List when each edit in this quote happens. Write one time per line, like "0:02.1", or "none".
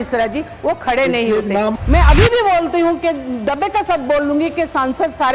0:01.7